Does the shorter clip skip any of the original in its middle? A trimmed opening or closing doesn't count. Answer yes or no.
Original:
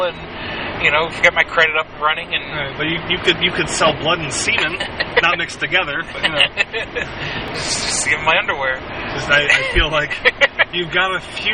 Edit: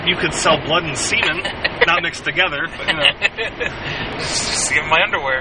no